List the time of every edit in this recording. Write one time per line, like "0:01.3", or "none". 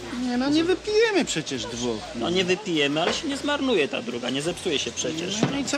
0:04.3